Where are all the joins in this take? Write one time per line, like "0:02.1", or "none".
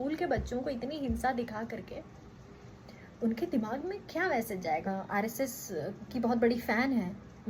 0:04.9
0:06.0